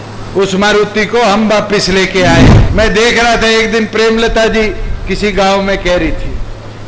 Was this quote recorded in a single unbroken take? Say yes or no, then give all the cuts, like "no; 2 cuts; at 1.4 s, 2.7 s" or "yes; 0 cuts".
no; 1 cut; at 2.6 s